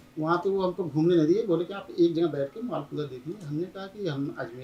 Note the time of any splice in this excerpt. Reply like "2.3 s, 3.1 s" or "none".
none